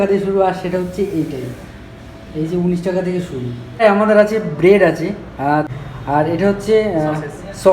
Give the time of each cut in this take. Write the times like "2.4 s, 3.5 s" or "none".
3.8 s, 5.6 s